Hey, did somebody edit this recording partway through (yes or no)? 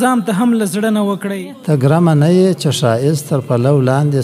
yes